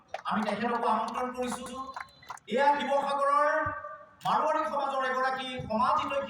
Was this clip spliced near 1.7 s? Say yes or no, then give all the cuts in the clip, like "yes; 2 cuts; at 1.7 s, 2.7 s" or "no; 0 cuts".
yes; 1 cut; at 1.7 s